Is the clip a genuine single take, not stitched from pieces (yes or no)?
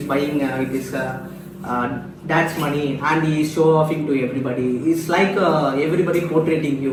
yes